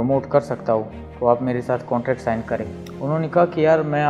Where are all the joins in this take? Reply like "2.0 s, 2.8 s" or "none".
2.7 s